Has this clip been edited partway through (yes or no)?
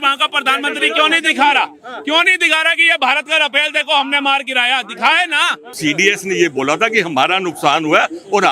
yes